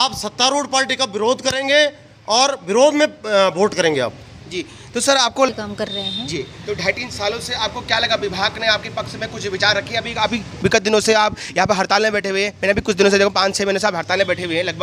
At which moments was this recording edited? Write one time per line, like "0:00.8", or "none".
0:05.5